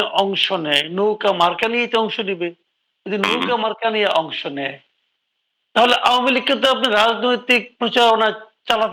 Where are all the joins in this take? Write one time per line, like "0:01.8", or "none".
none